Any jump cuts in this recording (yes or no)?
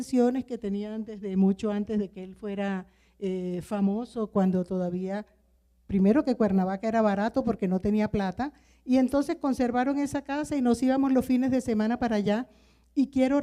no